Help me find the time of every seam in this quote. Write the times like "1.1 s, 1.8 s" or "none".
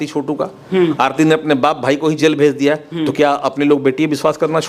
none